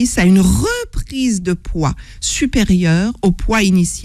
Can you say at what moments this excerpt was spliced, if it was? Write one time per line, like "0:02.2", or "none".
none

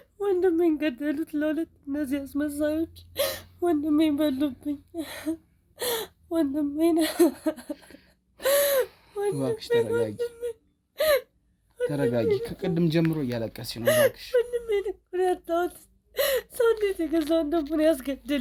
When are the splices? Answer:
none

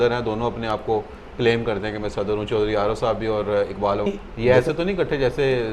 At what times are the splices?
0:04.1

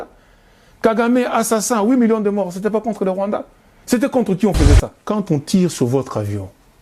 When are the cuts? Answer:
0:04.9

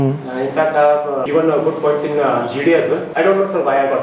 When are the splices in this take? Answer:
0:01.2
0:03.1

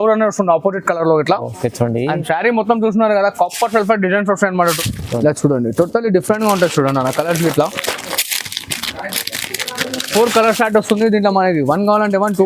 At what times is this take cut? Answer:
0:04.7

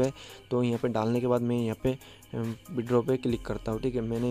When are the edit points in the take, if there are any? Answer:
none

